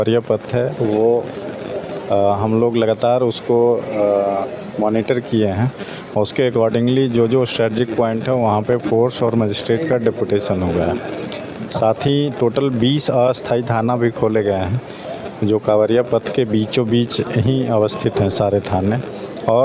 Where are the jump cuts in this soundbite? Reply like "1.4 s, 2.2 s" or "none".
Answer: none